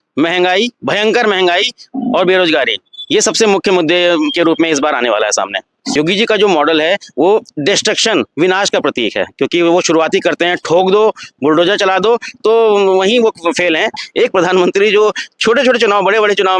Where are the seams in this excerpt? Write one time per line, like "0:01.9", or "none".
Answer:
0:05.9
0:14.0